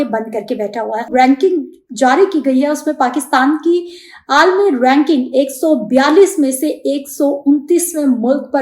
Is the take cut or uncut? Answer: cut